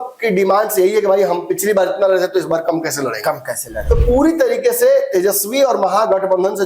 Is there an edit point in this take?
yes; 1 cut; at 3.7 s

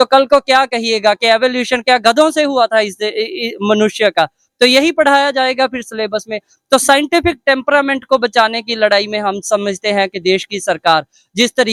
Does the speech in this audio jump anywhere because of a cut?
no; 0 cuts

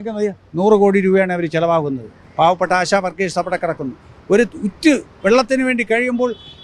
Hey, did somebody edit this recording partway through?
no; 0 cuts

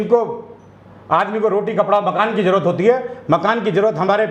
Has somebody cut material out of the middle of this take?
no; 0 cuts

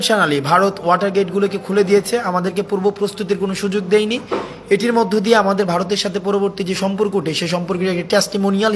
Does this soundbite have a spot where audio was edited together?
no; 0 cuts

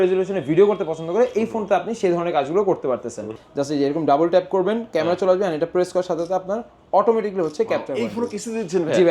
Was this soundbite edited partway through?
yes; 1 cut; at 3.4 s

